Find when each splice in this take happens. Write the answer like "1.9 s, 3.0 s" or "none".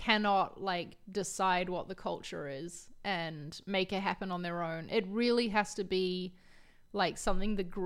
none